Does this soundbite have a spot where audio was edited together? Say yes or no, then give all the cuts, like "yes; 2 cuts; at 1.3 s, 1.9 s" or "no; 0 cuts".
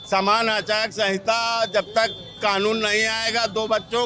no; 0 cuts